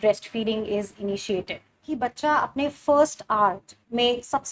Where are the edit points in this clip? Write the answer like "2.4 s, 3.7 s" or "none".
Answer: 1.9 s